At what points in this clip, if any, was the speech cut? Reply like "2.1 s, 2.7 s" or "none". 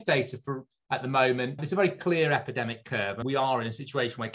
3.2 s